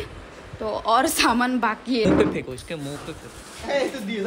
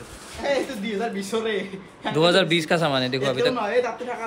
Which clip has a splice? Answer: first; 1 cut; at 2.0 s

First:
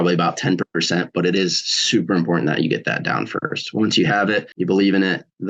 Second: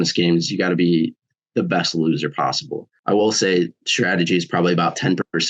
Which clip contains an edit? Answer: second; 1 cut; at 2.9 s

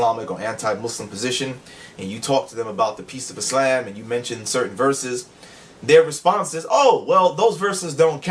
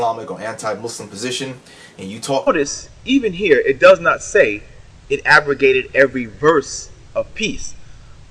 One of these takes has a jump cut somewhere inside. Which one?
first; 1 cut; at 2.4 s

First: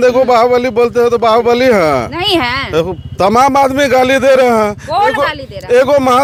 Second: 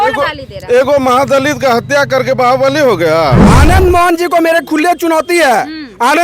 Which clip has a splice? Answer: second; 1 cut; at 3.4 s

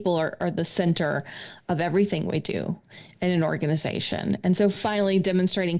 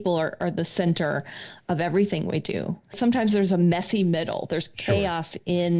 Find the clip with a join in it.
second; 1 cut; at 2.9 s

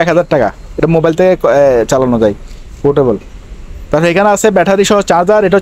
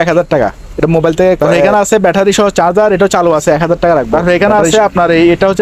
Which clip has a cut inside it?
second; 2 cuts; at 1.5 s, 4.1 s

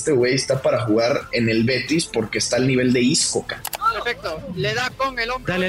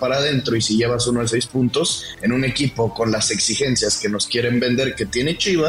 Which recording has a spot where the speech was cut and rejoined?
first; 1 cut; at 3.6 s

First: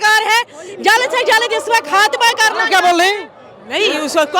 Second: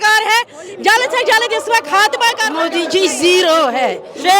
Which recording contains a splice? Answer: second; 1 cut; at 2.5 s

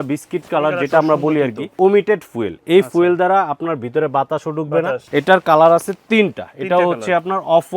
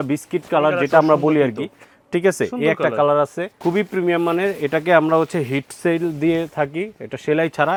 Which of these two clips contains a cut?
first; 2 cuts; at 1.8 s, 5.0 s

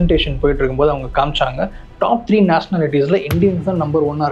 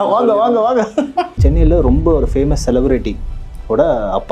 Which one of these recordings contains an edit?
second; 1 cut; at 1.4 s

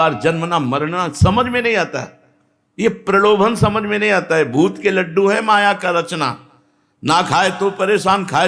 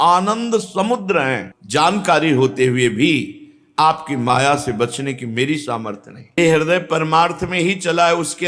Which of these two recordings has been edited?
second; 2 cuts; at 1.4 s, 6.4 s

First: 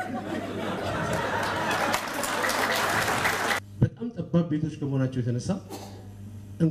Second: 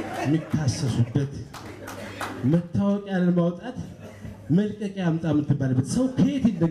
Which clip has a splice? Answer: first; 1 cut; at 3.6 s

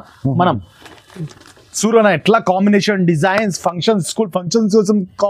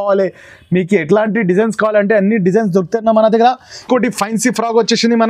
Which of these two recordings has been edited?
second; 1 cut; at 3.8 s

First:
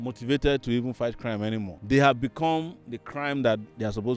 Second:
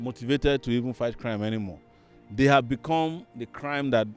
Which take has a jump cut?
first; 1 cut; at 1.7 s

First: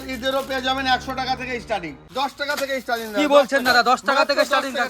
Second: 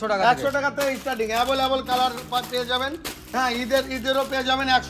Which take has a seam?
first; 1 cut; at 2.0 s

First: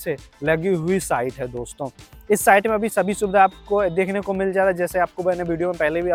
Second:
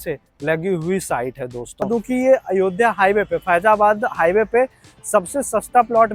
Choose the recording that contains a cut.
second; 1 cut; at 1.9 s

